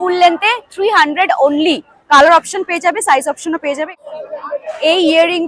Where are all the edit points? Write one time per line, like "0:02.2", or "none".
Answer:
0:03.9